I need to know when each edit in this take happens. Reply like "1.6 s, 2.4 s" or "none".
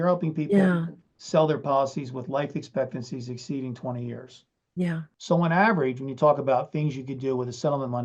5.1 s